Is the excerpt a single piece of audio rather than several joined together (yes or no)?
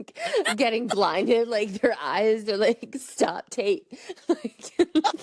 yes